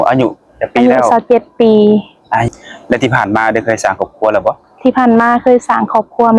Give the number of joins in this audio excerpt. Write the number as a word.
one